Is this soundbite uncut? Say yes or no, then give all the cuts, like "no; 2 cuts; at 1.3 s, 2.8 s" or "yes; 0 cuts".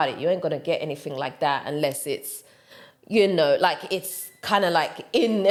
yes; 0 cuts